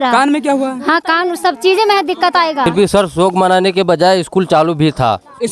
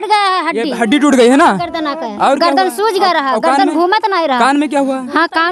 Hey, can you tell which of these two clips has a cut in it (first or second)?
first